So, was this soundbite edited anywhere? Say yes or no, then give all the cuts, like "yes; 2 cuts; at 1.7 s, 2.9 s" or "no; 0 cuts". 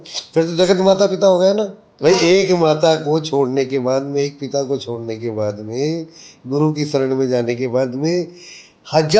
yes; 1 cut; at 1.8 s